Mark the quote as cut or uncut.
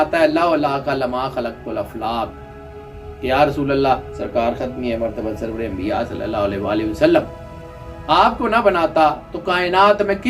uncut